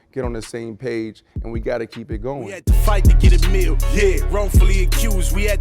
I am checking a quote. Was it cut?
yes; 1 cut; at 2.5 s

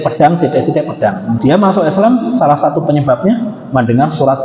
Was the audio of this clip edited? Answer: yes; 1 cut; at 1.4 s

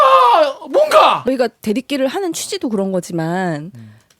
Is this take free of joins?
no; 1 cut; at 1.3 s

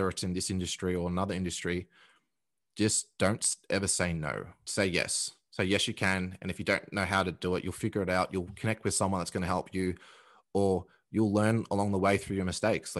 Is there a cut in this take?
yes; 1 cut; at 4.6 s

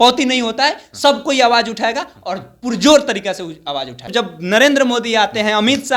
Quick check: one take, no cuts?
no; 1 cut; at 4.1 s

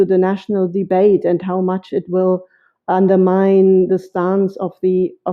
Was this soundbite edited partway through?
no; 0 cuts

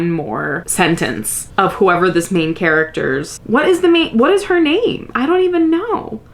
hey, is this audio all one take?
yes; 0 cuts

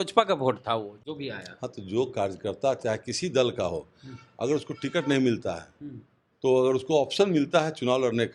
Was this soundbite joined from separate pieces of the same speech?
no; 0 cuts

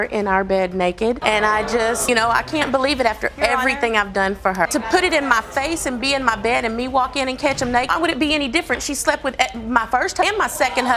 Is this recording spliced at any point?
no; 0 cuts

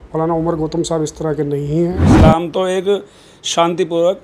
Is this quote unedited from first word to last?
no; 1 cut; at 2.1 s

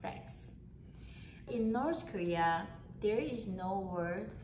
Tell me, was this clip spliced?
yes; 1 cut; at 1.5 s

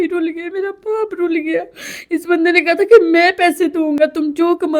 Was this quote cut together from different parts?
no; 0 cuts

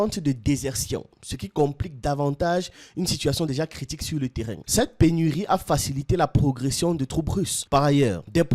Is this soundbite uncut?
no; 1 cut; at 4.5 s

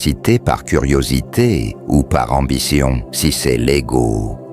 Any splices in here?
yes; 1 cut; at 3.1 s

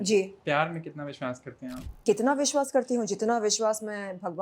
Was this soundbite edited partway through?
yes; 1 cut; at 2.0 s

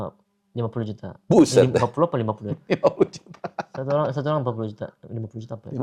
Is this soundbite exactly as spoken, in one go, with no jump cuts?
yes; 0 cuts

